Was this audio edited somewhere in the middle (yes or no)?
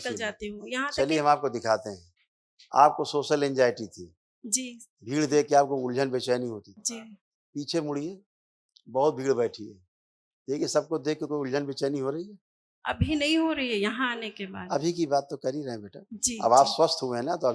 no